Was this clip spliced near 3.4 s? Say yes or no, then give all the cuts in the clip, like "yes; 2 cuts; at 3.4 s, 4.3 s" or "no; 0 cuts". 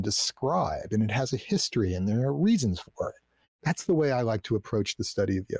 yes; 1 cut; at 3.4 s